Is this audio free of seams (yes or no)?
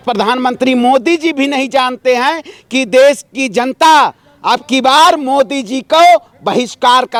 yes